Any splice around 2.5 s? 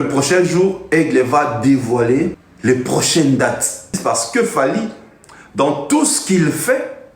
yes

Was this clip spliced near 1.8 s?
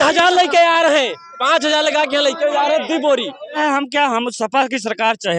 no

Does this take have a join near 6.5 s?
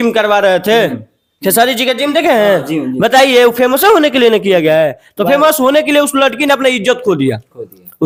no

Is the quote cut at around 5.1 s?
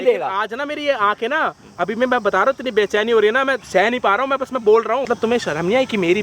yes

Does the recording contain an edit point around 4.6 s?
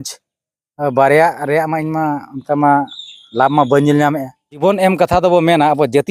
yes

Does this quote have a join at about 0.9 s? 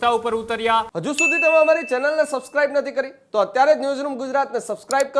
yes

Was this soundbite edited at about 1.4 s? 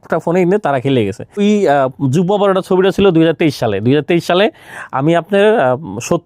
yes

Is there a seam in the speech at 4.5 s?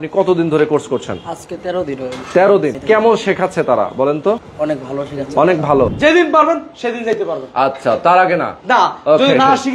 yes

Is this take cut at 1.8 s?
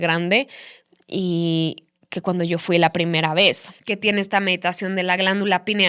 no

